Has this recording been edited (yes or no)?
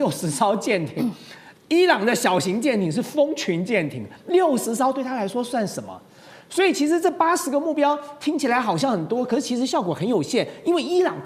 no